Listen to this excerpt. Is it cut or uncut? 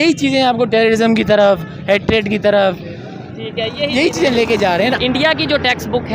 cut